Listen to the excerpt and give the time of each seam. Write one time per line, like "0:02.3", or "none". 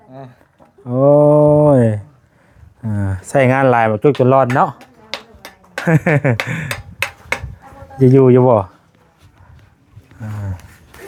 none